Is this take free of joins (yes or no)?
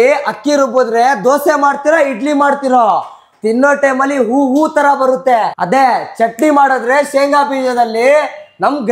yes